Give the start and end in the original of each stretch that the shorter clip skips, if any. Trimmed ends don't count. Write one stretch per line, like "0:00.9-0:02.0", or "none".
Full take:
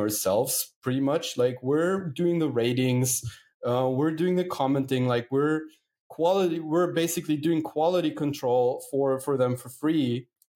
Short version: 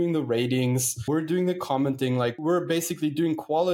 0:03.3-0:04.0
0:05.3-0:06.6